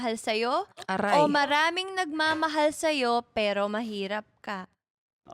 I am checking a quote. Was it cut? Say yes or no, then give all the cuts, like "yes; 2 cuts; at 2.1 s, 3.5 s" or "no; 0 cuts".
no; 0 cuts